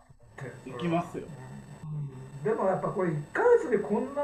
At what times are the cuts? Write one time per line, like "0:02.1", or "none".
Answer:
none